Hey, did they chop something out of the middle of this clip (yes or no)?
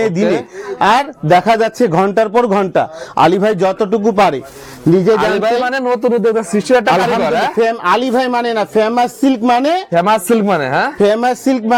no